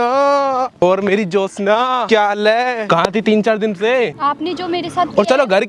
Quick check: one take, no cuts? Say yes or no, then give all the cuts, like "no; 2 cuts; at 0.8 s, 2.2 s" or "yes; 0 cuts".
no; 4 cuts; at 0.8 s, 2.0 s, 2.8 s, 4.2 s